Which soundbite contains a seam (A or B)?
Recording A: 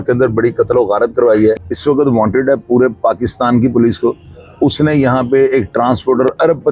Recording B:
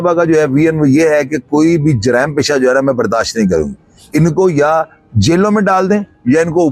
A